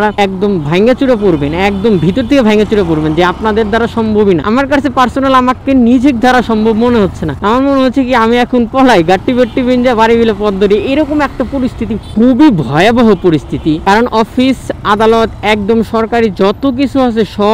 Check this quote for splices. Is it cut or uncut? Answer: uncut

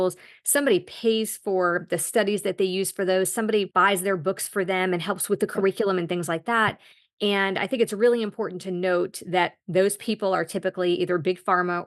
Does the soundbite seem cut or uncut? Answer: cut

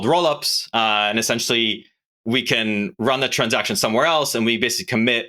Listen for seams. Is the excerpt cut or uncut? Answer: uncut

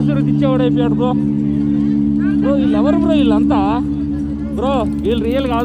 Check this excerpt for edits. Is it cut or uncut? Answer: uncut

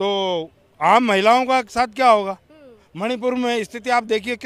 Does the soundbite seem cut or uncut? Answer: uncut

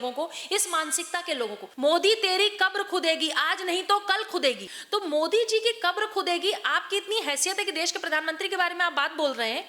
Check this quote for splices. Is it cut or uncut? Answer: cut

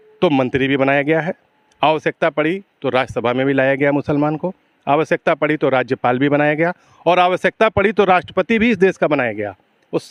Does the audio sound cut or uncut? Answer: uncut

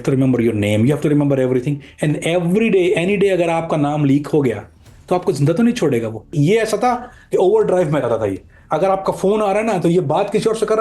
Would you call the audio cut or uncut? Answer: cut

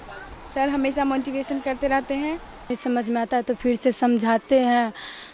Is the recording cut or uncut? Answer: cut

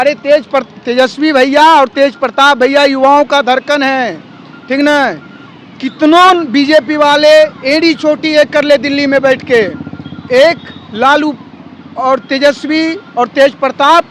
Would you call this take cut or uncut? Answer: uncut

